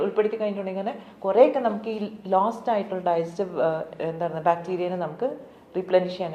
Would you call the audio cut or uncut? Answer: uncut